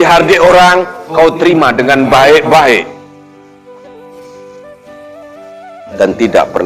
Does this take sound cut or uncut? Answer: uncut